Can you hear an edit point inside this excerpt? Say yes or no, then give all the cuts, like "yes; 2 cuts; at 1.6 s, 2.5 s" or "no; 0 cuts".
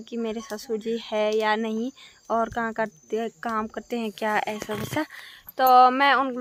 no; 0 cuts